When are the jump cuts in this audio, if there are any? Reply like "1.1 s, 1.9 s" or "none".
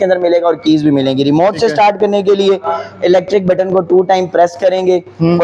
none